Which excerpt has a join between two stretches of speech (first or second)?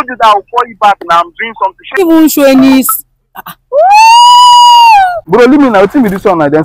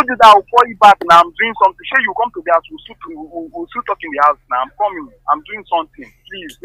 first